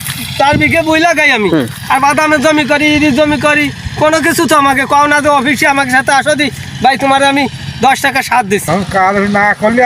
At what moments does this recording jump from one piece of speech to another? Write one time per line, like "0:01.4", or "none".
0:08.6